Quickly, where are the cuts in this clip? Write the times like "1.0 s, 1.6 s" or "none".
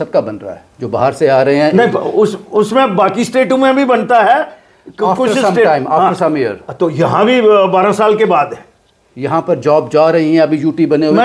none